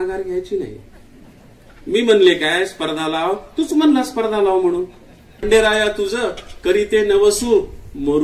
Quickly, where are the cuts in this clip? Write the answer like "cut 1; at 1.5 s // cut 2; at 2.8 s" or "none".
cut 1; at 5.5 s